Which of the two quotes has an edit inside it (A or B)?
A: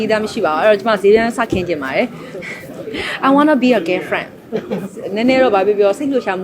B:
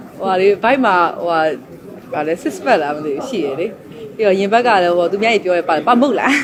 A